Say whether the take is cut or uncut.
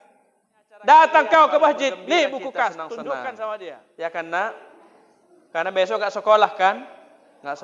cut